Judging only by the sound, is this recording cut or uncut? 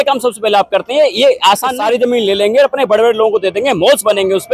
cut